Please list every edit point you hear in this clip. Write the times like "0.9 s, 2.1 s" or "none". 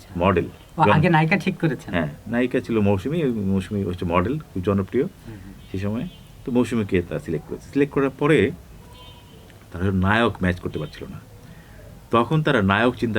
none